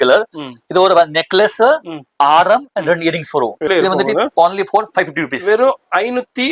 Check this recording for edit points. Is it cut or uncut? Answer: cut